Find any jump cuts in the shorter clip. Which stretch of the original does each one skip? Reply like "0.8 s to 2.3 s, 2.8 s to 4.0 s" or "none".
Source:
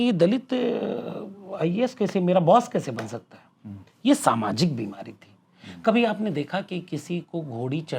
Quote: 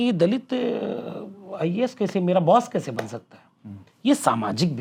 none